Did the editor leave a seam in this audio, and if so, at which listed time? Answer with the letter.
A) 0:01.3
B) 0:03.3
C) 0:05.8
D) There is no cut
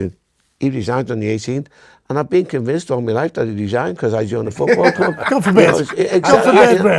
D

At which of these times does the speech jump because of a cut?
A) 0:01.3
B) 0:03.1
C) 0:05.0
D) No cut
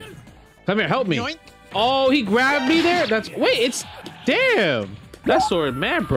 C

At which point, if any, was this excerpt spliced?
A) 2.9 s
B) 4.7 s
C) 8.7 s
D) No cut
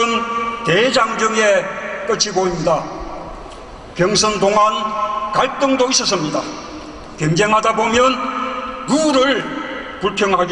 C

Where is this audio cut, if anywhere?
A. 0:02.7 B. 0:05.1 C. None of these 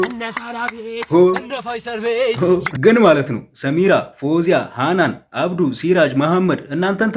A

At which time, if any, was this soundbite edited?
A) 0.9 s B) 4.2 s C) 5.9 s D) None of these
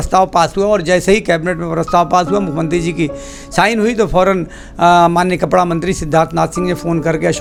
D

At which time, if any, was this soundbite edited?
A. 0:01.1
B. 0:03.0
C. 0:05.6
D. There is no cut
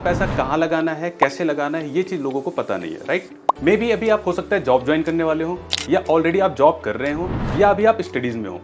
D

